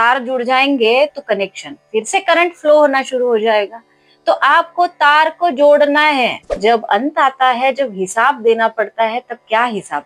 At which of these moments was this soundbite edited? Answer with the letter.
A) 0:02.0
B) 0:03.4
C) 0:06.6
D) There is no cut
C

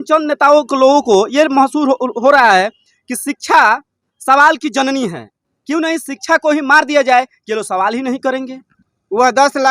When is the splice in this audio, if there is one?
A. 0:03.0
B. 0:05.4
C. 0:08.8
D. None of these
C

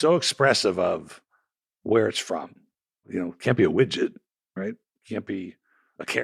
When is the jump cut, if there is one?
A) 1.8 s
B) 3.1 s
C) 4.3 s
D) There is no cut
B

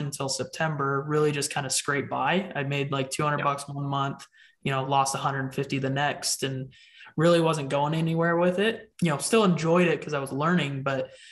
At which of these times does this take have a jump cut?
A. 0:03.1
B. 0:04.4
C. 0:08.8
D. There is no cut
C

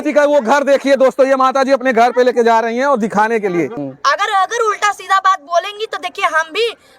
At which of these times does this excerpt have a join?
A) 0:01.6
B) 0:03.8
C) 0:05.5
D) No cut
B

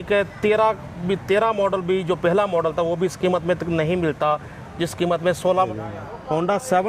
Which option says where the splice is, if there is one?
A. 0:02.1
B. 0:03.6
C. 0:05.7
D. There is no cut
C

